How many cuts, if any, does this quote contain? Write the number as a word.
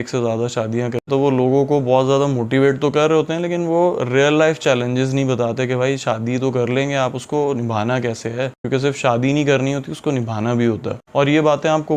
one